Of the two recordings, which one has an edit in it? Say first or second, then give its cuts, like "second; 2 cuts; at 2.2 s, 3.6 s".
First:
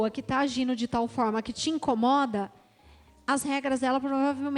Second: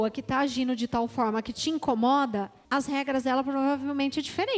second; 1 cut; at 2.6 s